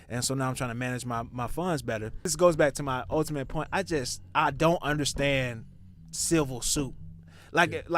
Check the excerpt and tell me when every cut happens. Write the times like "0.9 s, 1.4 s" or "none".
2.3 s